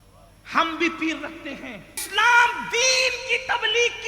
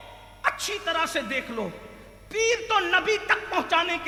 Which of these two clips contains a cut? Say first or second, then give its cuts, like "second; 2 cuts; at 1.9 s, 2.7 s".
first; 1 cut; at 1.9 s